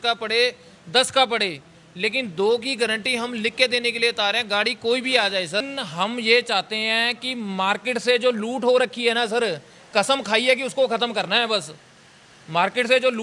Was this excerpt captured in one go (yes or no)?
no